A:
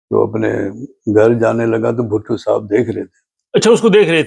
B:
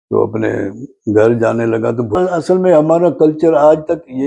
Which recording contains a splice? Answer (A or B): B